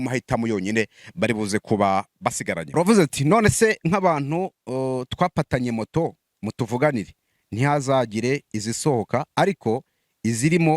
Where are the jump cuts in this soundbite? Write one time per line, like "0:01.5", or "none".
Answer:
0:02.8